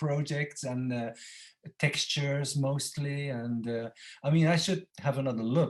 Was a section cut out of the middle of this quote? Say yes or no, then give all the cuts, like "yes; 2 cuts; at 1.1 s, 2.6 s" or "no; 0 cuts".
no; 0 cuts